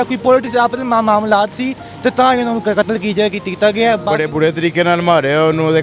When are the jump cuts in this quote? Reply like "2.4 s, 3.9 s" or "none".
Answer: 4.2 s